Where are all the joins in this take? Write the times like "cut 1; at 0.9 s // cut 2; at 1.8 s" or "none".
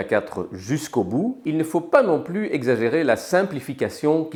none

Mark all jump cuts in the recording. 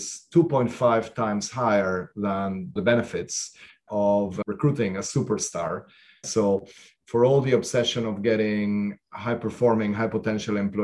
cut 1; at 2.8 s // cut 2; at 4.4 s // cut 3; at 6.3 s

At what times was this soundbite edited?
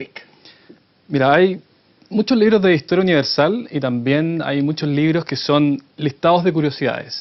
cut 1; at 1.6 s

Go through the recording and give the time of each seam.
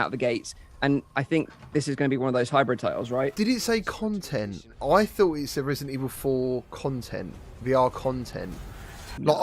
cut 1; at 3.3 s

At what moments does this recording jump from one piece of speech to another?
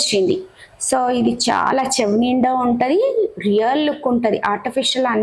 none

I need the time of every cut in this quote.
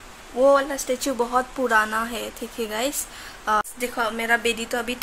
cut 1; at 3.6 s

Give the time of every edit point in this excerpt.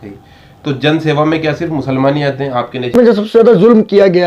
cut 1; at 3.2 s

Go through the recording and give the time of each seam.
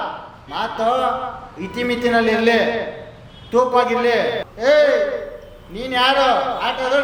cut 1; at 4.4 s

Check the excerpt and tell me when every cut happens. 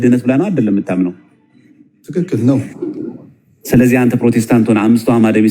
none

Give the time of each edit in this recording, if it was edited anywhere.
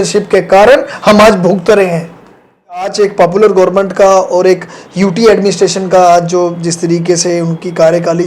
cut 1; at 2.9 s

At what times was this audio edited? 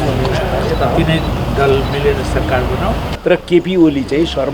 cut 1; at 3.1 s

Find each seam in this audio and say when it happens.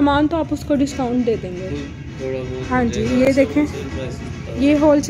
none

